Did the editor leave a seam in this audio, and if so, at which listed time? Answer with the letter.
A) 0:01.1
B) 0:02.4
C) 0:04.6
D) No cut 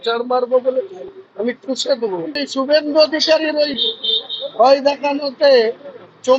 B